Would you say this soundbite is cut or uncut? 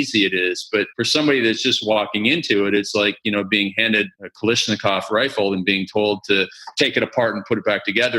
cut